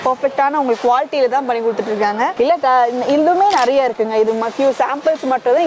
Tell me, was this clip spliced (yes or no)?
no